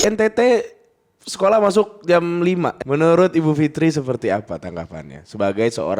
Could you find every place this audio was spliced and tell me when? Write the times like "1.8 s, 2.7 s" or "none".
2.8 s

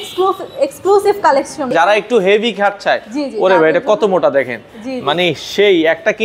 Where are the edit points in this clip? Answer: 1.7 s

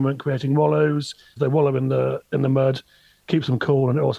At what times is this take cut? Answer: 1.2 s, 3.3 s

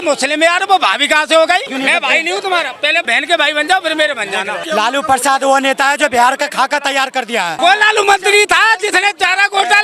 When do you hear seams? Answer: 1.7 s, 3.0 s, 4.6 s, 7.5 s

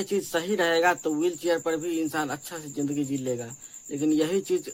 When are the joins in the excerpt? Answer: none

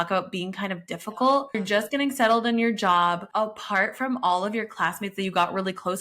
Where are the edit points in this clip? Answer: 1.6 s, 3.2 s

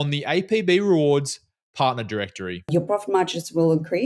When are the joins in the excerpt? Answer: 2.7 s

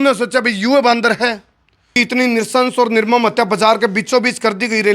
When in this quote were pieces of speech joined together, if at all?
1.9 s

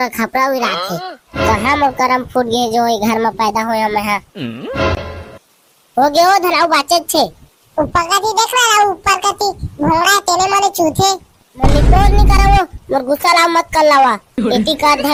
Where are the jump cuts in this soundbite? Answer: none

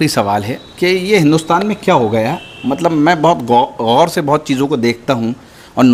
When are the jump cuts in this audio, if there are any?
none

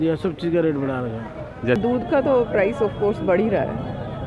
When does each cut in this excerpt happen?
1.6 s

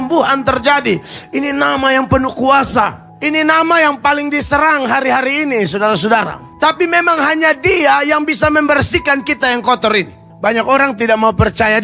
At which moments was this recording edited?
3.1 s, 6.4 s, 10.2 s

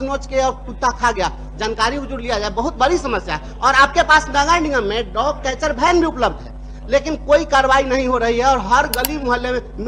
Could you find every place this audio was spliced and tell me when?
none

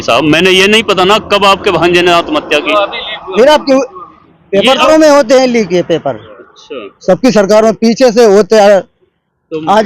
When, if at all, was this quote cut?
4.9 s

